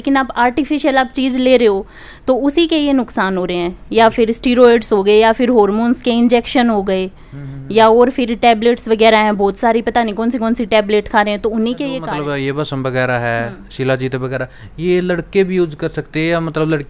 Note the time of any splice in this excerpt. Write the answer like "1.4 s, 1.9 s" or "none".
11.9 s